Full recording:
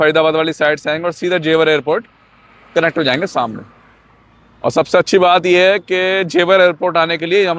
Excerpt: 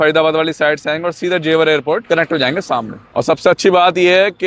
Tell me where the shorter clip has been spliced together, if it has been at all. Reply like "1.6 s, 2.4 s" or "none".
2.0 s, 3.0 s